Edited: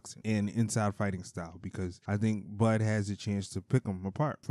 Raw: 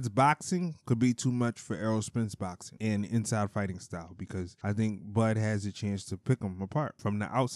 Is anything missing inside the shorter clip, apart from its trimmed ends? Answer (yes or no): no